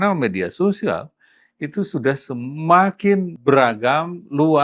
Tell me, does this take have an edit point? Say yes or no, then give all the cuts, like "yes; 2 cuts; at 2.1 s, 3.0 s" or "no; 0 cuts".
yes; 1 cut; at 3.3 s